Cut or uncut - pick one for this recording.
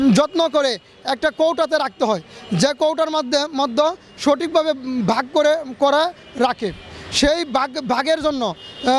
uncut